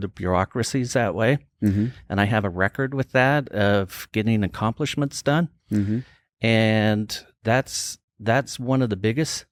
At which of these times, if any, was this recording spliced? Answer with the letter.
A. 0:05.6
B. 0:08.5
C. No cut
C